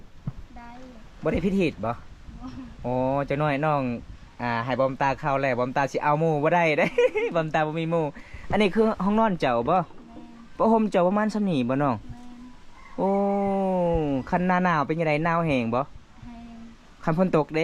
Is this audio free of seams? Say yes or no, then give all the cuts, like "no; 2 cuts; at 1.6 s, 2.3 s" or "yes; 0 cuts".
yes; 0 cuts